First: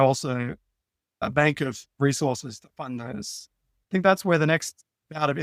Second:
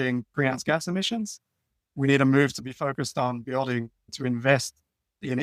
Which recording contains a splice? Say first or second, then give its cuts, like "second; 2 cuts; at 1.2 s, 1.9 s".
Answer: second; 1 cut; at 4.0 s